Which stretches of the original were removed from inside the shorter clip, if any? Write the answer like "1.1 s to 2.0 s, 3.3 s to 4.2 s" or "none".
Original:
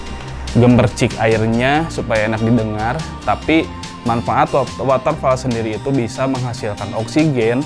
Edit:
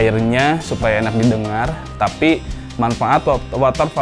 none